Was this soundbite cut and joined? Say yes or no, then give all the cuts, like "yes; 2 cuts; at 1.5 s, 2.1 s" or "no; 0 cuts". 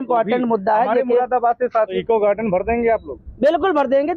yes; 1 cut; at 2.0 s